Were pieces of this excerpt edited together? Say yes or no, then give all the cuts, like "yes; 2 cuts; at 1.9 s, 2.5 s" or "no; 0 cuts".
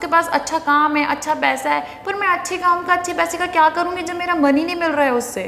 no; 0 cuts